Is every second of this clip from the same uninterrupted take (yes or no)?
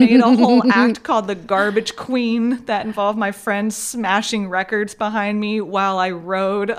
yes